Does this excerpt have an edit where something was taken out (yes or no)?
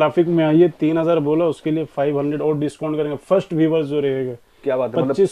no